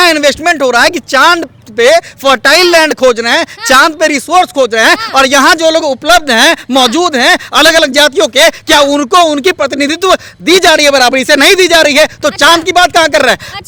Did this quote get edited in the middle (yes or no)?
no